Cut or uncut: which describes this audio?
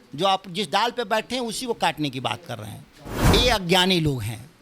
cut